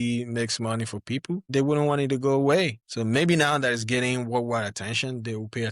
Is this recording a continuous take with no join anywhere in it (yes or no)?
no